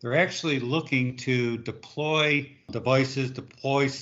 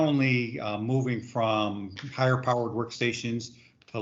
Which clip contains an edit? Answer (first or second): first